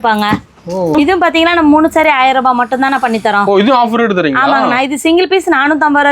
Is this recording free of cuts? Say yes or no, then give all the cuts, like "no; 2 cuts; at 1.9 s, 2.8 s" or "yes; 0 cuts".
no; 1 cut; at 0.9 s